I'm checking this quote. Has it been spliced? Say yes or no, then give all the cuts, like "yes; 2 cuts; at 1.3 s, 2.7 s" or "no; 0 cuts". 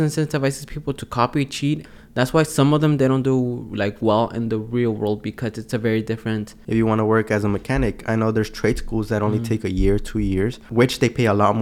yes; 3 cuts; at 1.8 s, 6.5 s, 10.6 s